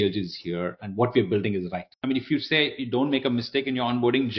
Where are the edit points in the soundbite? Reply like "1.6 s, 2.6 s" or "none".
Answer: 2.1 s